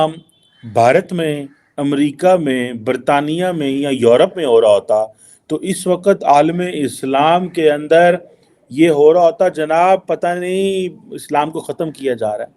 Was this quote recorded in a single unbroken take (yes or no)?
yes